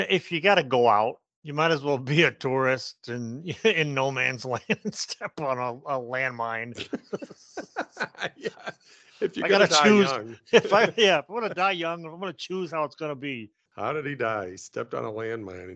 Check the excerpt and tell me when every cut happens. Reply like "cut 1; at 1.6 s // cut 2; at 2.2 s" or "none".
none